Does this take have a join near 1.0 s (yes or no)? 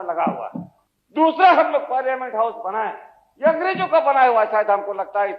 yes